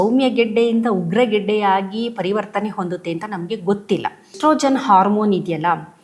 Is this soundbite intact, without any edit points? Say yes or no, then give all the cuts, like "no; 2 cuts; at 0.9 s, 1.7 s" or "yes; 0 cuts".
no; 1 cut; at 4.3 s